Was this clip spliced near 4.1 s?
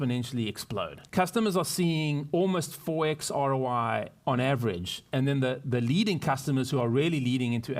no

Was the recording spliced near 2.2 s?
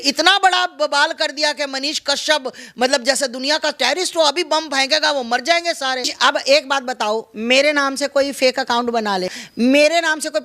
no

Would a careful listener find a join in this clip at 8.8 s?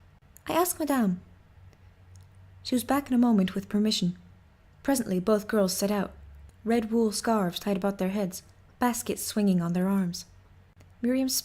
yes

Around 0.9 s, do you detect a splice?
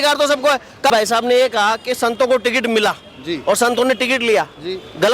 yes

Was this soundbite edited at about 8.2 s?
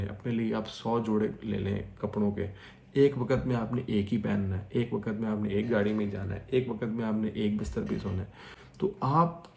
no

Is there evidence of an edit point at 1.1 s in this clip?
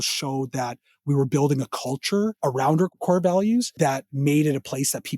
no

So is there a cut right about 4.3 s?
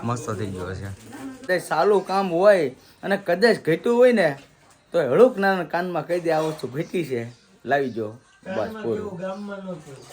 no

